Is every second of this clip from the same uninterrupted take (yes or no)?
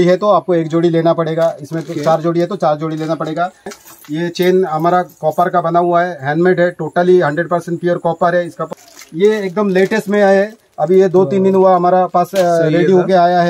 no